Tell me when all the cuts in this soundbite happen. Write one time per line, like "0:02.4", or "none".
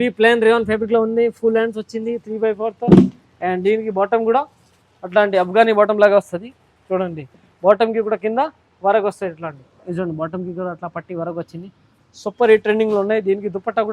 none

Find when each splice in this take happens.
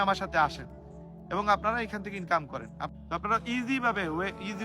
0:02.8

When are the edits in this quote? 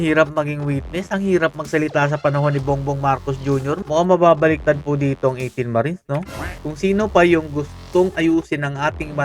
0:03.8
0:06.5

